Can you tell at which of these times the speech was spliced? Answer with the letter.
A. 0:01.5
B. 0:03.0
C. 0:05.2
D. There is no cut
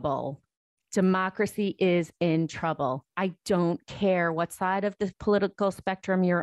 C